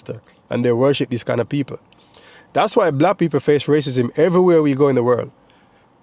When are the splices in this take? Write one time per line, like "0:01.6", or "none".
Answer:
none